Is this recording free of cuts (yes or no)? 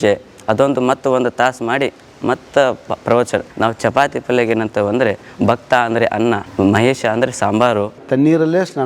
no